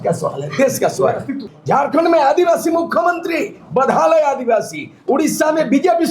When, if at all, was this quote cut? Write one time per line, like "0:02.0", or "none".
0:01.5

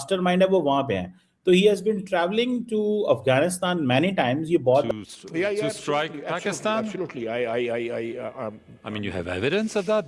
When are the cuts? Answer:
0:04.9

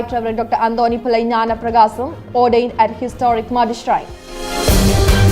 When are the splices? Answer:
0:04.4

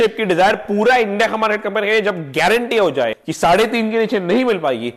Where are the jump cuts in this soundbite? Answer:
0:03.2

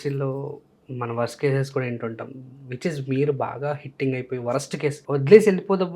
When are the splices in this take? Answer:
0:05.0

